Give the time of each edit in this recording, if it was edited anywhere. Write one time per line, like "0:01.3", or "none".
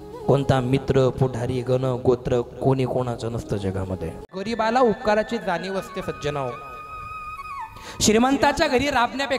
0:04.5